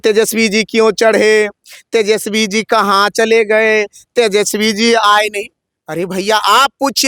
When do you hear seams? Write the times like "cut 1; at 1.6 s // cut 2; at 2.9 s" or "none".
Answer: none